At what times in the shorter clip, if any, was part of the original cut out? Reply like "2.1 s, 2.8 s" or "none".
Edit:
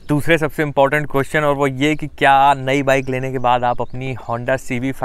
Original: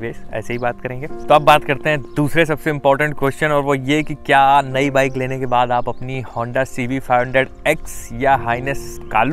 none